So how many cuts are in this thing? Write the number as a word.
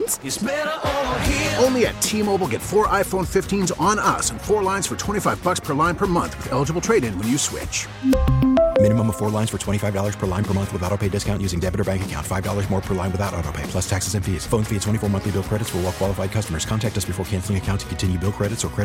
zero